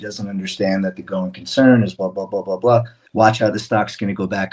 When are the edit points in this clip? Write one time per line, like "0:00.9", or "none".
0:03.0